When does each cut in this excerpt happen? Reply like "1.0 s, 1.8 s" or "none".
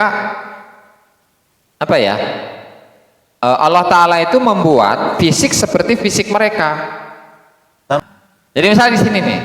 8.0 s